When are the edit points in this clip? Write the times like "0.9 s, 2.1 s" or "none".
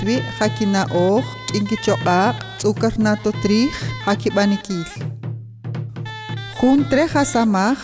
6.2 s